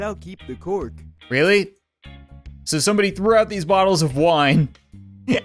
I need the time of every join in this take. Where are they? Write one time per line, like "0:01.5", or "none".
0:01.1